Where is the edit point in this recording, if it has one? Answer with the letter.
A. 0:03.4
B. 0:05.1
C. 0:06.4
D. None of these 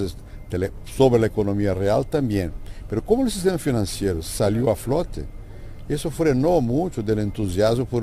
A